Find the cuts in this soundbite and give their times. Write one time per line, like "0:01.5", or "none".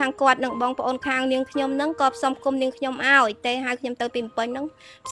none